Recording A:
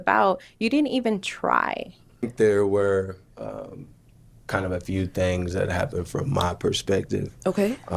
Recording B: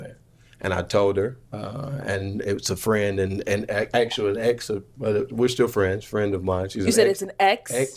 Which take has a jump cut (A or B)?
A